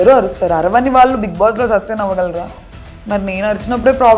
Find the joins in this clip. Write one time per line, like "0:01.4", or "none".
none